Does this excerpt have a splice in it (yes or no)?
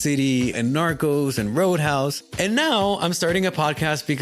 yes